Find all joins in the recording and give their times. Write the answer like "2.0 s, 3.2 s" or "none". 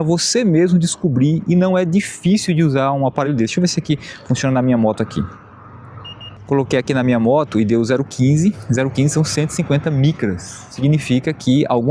none